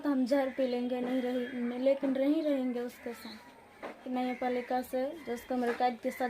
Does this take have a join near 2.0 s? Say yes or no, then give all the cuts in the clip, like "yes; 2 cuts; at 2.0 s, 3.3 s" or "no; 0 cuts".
no; 1 cut; at 4.1 s